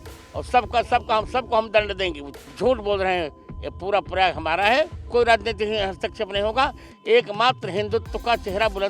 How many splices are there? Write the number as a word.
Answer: two